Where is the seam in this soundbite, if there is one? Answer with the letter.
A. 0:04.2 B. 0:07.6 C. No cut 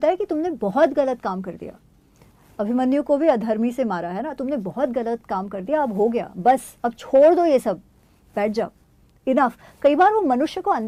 C